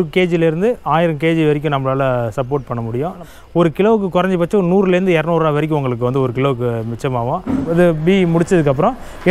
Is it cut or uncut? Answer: cut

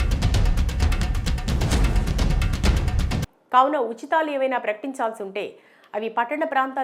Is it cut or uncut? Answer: cut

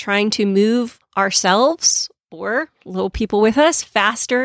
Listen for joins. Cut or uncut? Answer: cut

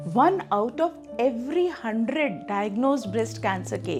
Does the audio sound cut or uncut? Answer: uncut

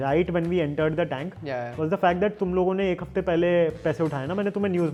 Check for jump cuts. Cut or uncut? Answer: uncut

